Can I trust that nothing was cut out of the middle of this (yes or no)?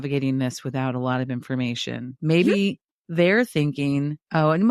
yes